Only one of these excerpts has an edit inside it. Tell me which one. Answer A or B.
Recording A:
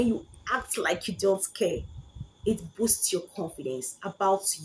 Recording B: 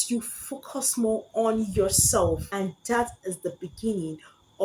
B